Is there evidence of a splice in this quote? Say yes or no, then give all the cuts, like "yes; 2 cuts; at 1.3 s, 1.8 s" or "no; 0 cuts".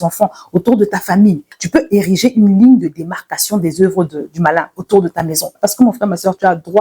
yes; 2 cuts; at 1.5 s, 5.5 s